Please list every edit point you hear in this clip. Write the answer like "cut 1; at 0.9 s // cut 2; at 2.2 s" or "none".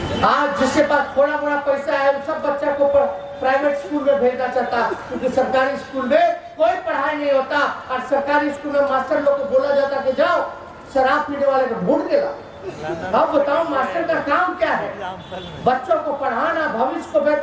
none